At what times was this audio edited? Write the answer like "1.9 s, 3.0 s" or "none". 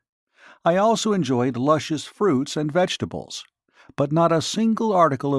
4.5 s